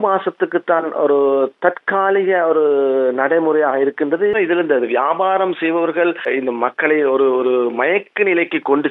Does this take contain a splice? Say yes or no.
yes